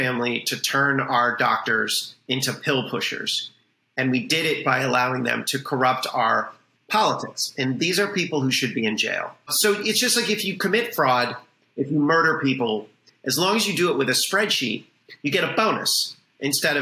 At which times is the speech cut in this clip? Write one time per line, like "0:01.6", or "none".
0:09.5